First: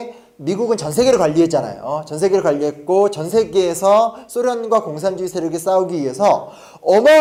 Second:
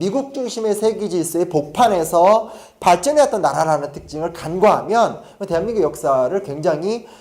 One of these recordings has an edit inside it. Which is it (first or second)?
second